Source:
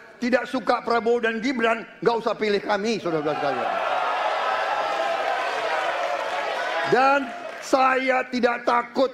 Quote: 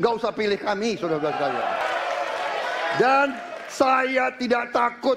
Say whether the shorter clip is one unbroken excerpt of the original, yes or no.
no